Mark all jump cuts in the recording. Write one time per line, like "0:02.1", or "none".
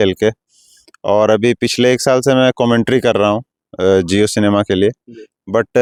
none